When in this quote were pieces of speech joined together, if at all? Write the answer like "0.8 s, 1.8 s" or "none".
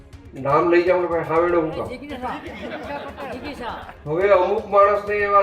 3.9 s